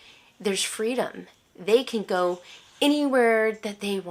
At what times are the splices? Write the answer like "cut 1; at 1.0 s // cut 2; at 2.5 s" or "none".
none